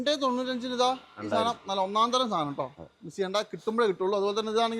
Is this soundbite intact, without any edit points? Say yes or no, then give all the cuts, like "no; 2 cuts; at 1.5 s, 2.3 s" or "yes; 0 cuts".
yes; 0 cuts